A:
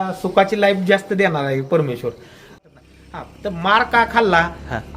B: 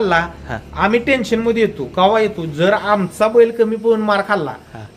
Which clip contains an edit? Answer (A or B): A